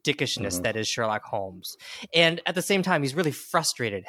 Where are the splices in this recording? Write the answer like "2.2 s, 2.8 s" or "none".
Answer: none